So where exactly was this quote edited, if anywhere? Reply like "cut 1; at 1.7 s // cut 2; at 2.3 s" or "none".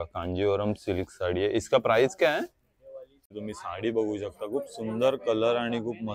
cut 1; at 3.4 s

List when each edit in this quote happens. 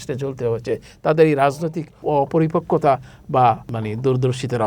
cut 1; at 2.0 s // cut 2; at 3.7 s

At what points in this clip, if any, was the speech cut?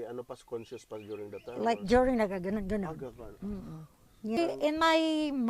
cut 1; at 4.4 s

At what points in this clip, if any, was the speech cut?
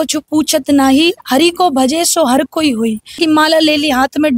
cut 1; at 3.2 s

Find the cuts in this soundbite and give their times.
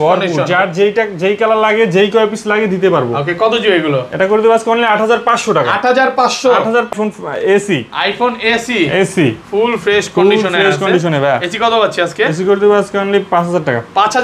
cut 1; at 6.9 s

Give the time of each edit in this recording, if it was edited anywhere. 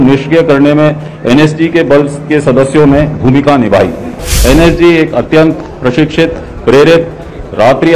cut 1; at 4.3 s

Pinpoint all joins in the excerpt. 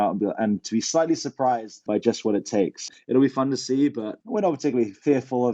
cut 1; at 1.8 s // cut 2; at 2.9 s // cut 3; at 4.1 s

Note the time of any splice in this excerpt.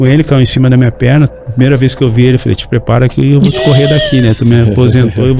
cut 1; at 1.3 s

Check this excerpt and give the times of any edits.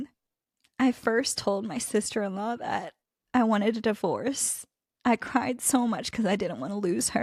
none

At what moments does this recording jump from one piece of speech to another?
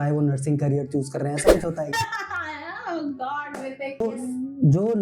cut 1; at 4.0 s

